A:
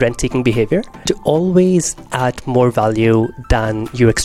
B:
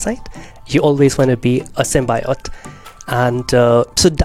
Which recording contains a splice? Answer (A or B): A